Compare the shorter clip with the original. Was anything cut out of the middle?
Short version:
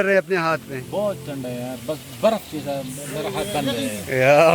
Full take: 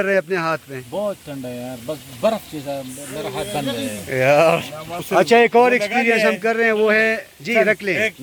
no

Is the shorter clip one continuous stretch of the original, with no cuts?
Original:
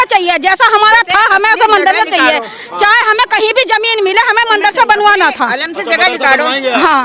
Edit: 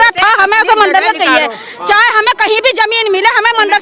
yes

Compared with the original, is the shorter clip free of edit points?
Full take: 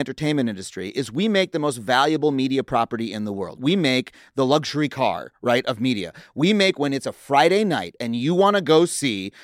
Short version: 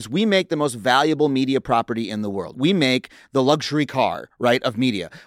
yes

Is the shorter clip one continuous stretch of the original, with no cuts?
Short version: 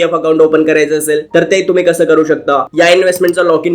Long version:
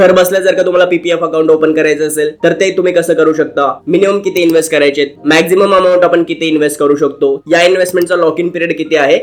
no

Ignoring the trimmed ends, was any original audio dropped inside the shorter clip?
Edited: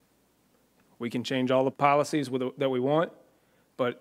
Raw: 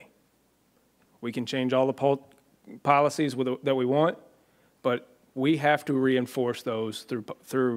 yes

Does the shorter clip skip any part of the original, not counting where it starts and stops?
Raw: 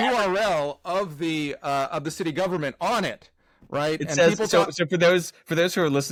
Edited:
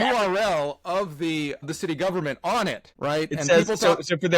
yes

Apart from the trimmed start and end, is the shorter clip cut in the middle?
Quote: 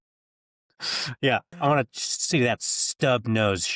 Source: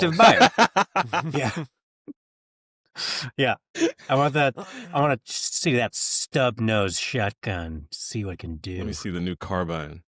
yes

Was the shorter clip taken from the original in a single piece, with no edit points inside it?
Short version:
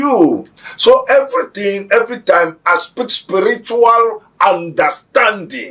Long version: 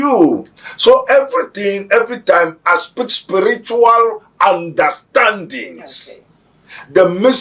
yes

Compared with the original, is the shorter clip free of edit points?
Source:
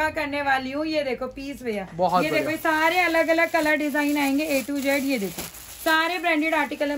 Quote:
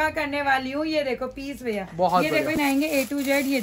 no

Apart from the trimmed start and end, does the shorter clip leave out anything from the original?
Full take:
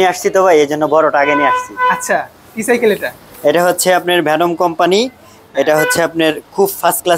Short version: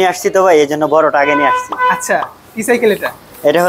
no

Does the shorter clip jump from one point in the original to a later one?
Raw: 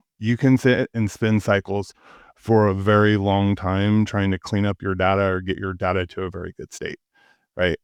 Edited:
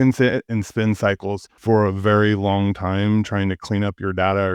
yes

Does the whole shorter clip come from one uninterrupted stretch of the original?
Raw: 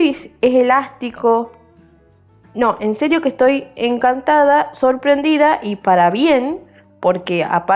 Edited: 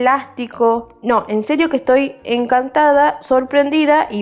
no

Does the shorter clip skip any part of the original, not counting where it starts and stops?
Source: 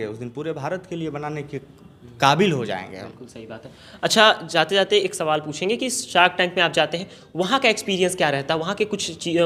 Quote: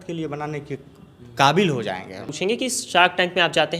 yes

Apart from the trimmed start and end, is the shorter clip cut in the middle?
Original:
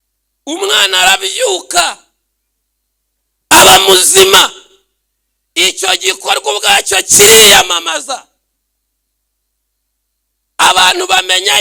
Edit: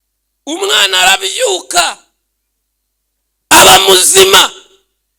no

